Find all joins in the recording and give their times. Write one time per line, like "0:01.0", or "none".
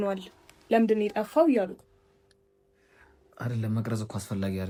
none